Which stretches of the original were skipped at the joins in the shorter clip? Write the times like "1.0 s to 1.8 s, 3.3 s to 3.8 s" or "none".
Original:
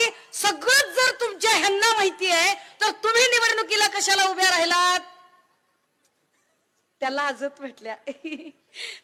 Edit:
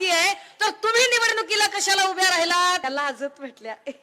5.0 s to 7.0 s